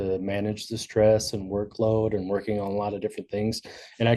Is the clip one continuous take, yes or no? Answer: yes